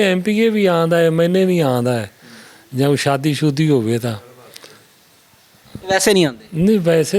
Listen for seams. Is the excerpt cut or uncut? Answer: uncut